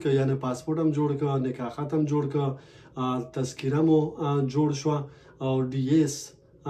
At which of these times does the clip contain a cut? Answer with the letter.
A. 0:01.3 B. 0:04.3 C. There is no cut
C